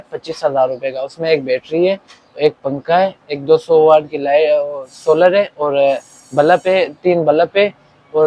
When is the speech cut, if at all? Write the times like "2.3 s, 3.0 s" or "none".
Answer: none